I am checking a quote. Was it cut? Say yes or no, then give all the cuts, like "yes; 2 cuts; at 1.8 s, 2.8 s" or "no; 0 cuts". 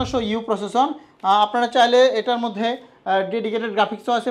no; 0 cuts